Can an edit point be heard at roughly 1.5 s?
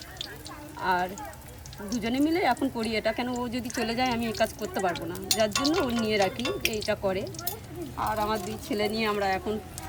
no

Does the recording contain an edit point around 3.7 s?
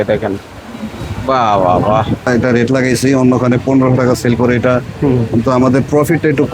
no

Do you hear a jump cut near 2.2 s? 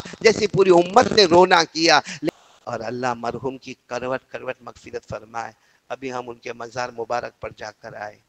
yes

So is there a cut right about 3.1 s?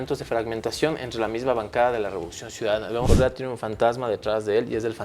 yes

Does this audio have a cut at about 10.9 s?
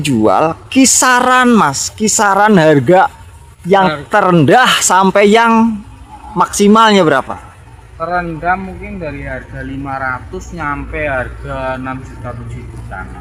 no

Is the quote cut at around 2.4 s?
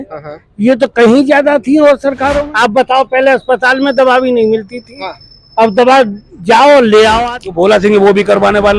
yes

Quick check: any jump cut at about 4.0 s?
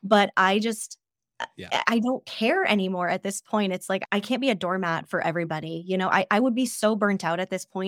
yes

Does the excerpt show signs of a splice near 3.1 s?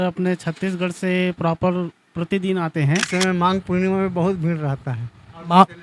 yes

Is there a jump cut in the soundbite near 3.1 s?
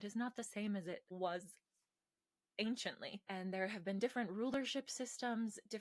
yes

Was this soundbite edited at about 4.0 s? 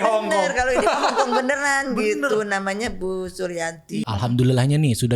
yes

